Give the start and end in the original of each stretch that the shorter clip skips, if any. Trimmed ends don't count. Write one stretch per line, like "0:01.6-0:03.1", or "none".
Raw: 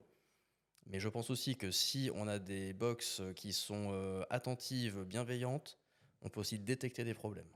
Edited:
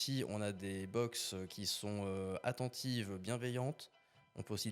none